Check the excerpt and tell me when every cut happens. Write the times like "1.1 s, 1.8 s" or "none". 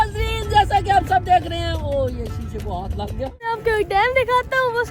3.5 s